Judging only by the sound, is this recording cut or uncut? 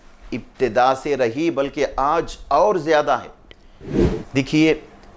cut